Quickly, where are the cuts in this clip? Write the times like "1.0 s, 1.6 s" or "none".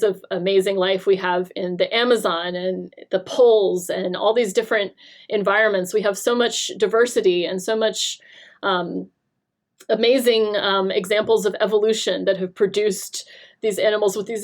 none